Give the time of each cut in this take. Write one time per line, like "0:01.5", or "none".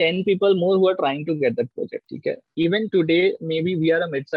0:02.0